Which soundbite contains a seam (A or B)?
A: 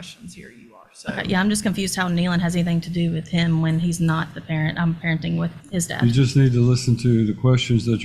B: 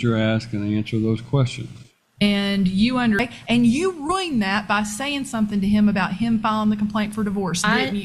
B